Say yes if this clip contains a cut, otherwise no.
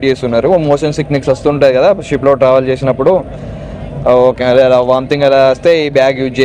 no